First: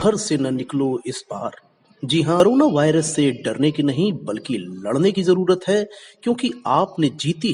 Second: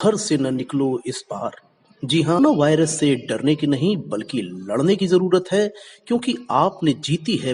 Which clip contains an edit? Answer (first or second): second